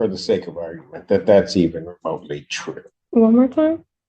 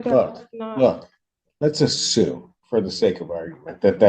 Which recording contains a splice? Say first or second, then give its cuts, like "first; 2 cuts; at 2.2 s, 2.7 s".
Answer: first; 1 cut; at 2.9 s